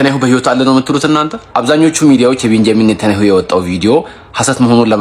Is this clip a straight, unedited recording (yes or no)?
yes